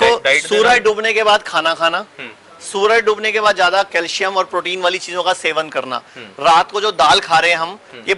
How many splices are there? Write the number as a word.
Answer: zero